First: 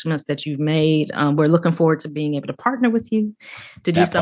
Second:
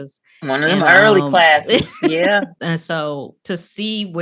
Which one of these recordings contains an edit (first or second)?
second